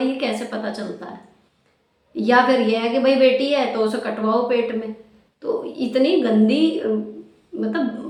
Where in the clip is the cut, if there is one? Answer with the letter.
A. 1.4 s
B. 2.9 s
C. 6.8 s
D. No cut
D